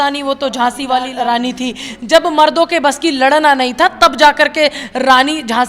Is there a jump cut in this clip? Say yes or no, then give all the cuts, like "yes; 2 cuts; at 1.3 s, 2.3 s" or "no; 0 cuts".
yes; 1 cut; at 1.1 s